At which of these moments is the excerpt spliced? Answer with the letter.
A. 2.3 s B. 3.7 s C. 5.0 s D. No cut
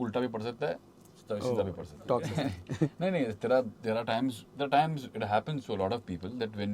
A